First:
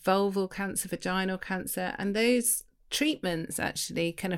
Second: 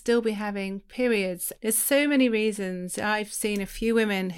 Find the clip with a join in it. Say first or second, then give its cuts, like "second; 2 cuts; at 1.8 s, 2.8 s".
second; 1 cut; at 1.5 s